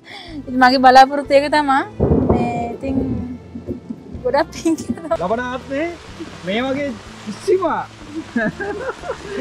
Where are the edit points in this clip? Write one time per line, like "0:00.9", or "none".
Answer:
0:05.2